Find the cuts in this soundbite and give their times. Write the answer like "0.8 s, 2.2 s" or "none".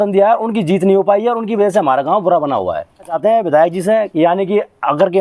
3.2 s

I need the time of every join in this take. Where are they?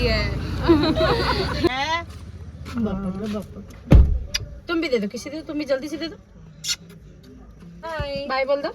1.7 s, 7.8 s

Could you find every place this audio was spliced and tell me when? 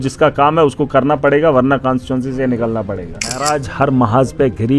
3.4 s

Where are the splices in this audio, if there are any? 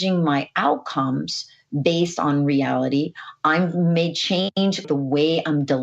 4.8 s

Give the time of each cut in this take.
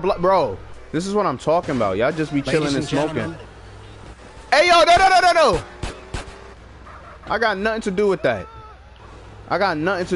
none

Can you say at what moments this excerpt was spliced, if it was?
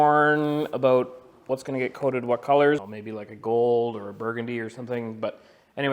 2.9 s

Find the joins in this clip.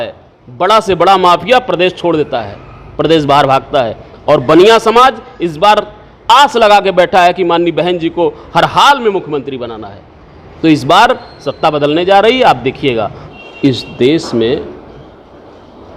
13.2 s

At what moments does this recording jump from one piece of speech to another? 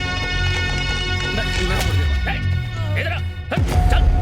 1.9 s

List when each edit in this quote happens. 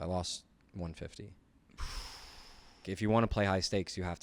2.9 s

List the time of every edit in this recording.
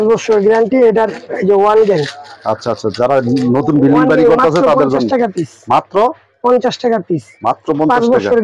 none

